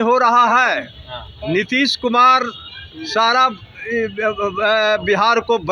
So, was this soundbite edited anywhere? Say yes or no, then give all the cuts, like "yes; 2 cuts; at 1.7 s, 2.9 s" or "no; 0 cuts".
no; 0 cuts